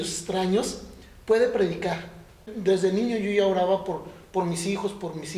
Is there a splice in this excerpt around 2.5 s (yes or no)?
yes